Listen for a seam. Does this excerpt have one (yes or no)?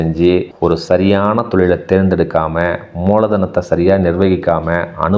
no